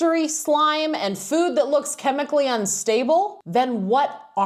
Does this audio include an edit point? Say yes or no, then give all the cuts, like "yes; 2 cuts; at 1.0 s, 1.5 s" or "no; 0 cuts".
no; 0 cuts